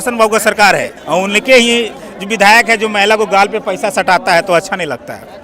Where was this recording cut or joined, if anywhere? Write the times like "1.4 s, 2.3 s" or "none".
0.9 s